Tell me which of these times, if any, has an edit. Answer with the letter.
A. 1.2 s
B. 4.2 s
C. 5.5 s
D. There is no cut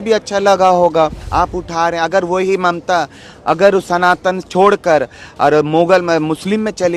A